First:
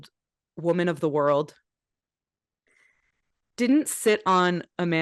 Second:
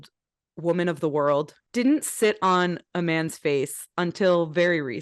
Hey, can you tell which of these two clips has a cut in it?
second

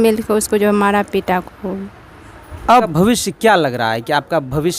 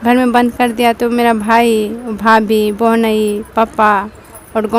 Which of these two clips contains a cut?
first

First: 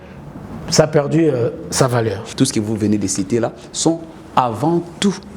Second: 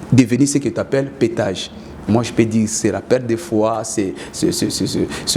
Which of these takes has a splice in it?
first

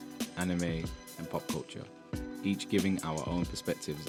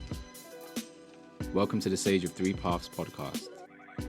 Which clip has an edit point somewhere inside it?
second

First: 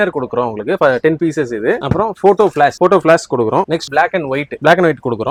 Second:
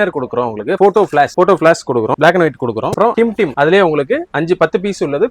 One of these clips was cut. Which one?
second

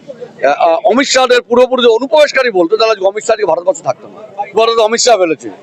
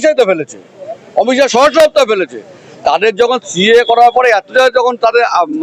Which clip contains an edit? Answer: first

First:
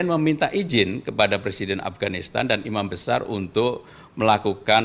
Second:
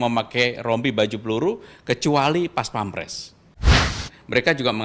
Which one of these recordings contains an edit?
second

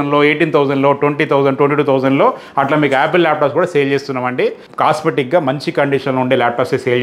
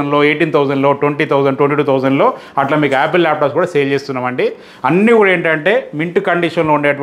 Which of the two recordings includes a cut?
first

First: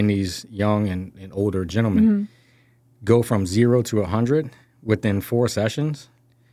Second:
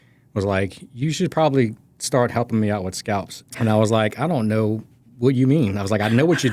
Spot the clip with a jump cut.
second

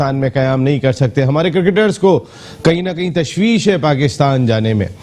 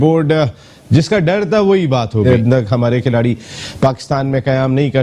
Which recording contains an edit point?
second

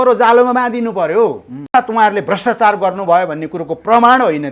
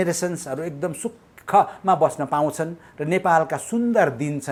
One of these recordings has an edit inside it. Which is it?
first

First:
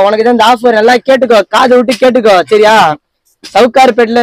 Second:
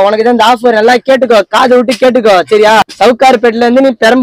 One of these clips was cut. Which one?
second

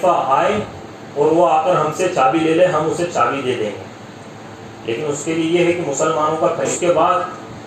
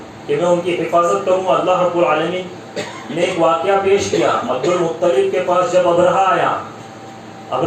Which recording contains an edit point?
first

